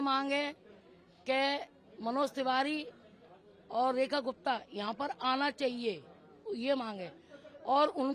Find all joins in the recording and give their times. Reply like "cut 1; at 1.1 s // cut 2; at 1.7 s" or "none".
none